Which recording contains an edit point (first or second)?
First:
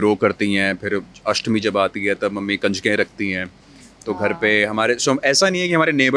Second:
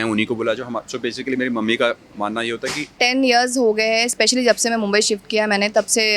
second